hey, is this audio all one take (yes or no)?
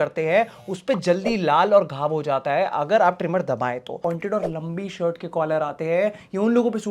no